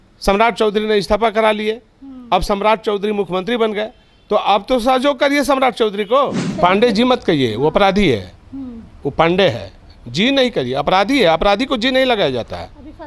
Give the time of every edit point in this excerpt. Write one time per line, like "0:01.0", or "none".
0:06.4